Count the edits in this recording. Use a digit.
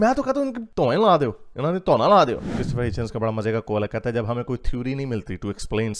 1